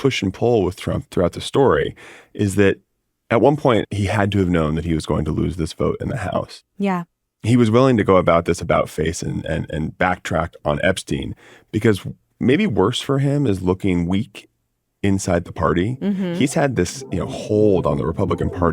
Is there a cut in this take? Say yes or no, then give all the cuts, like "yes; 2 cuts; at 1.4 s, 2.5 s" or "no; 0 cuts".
yes; 2 cuts; at 1.1 s, 3.9 s